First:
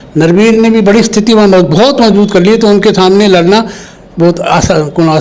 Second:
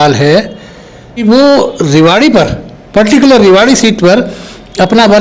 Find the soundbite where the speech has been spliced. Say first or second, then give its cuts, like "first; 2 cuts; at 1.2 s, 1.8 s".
second; 1 cut; at 1.2 s